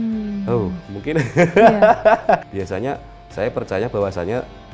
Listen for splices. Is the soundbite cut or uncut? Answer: cut